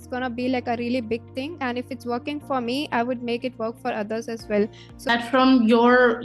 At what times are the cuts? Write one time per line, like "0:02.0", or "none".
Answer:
0:05.1